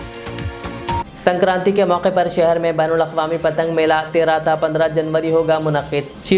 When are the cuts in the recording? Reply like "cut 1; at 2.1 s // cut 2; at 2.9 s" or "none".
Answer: cut 1; at 1.0 s